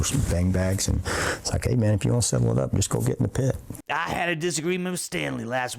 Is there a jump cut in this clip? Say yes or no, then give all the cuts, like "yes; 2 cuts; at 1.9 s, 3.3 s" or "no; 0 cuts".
yes; 1 cut; at 3.7 s